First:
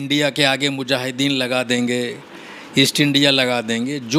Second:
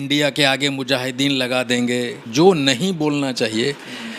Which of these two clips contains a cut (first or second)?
second